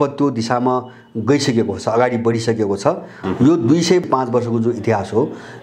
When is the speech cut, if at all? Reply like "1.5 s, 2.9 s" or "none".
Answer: 3.1 s, 4.0 s